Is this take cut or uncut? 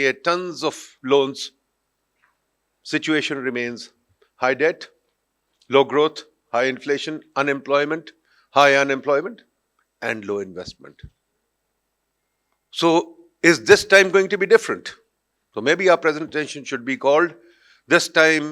uncut